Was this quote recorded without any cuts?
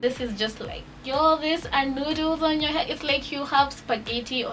yes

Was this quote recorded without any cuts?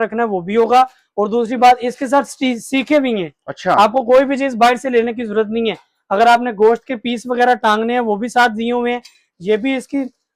yes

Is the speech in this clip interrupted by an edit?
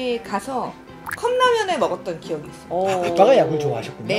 no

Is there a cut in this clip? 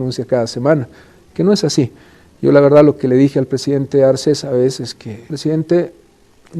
yes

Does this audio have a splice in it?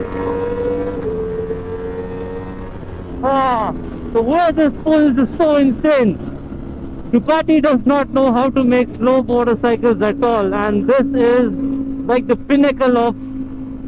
no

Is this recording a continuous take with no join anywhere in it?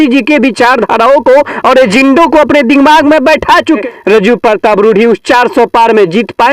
no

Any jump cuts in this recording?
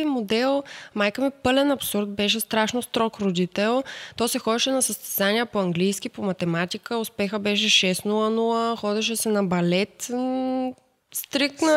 no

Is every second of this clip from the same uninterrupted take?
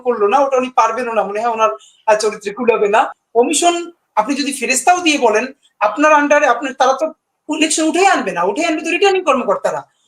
no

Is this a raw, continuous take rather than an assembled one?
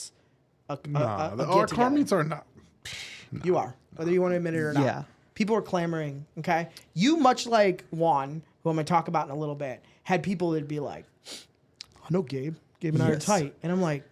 yes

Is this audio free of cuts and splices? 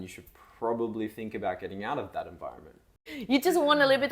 no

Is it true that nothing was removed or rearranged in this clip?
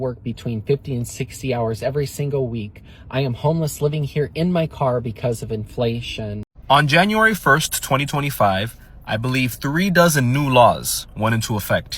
no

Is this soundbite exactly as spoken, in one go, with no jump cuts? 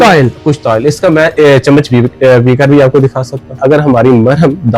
no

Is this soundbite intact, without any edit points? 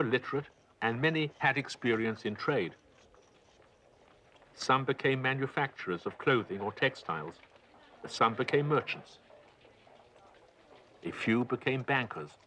no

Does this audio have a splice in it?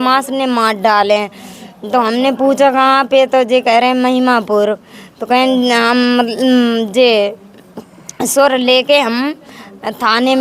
no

